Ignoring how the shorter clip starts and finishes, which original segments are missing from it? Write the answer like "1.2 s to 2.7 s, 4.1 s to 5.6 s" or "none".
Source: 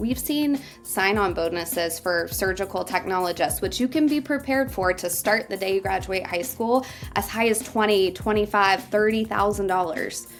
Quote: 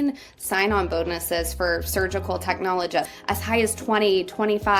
3.6 s to 7.0 s

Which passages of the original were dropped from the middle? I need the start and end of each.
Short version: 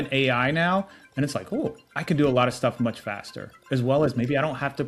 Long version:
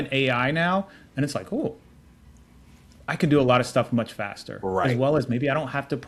1.9 s to 3.0 s

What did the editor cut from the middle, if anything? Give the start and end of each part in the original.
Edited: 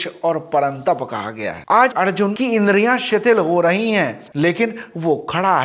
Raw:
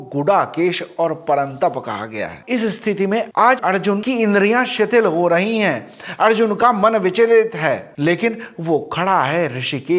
2.4 s to 3.3 s, 5.9 s to 7.9 s

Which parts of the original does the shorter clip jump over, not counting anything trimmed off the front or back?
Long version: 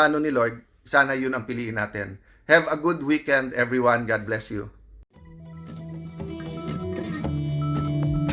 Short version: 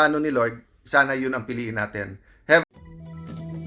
2.7 s to 5.1 s

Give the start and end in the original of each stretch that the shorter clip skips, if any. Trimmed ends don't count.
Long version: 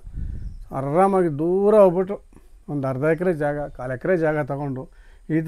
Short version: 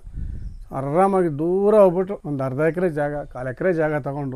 2.2 s to 2.6 s

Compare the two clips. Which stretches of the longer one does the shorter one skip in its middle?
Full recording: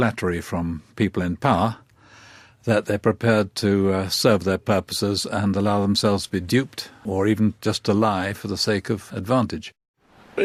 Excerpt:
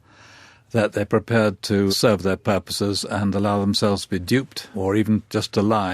3.8 s to 4.1 s, 6.8 s to 6.9 s

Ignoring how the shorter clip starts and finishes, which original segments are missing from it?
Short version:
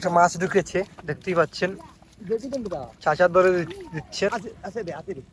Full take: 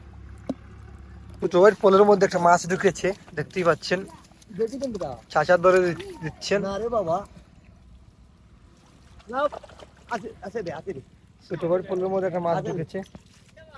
6.6 s to 10.1 s

